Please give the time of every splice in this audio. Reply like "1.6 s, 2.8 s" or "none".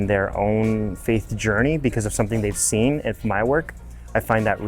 none